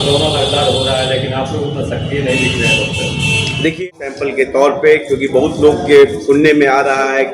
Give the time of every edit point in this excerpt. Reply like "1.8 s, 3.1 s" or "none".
3.9 s